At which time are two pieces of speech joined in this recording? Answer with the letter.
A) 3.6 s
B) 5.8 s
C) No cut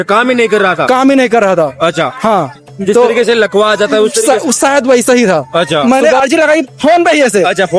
B